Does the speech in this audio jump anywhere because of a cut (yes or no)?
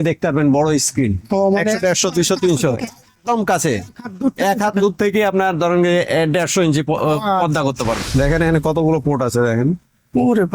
yes